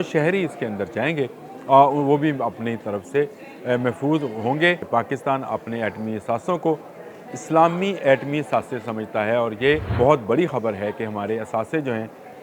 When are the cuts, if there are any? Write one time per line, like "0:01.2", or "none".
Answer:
0:04.8
0:09.9